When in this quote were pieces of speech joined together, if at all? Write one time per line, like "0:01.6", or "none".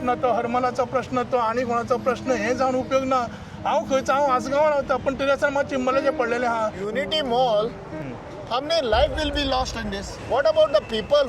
0:06.8
0:10.1